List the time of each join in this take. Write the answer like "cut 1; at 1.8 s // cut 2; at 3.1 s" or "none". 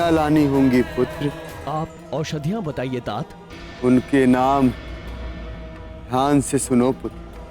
cut 1; at 1.5 s